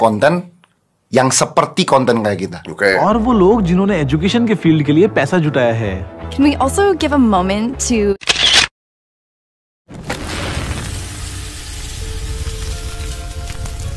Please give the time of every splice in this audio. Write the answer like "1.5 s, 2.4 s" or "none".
3.0 s